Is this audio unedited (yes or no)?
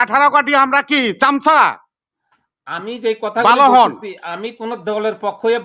yes